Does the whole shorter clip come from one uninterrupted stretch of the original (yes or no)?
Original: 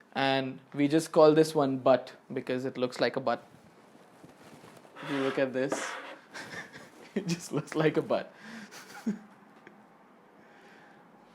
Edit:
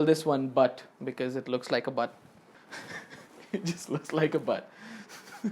no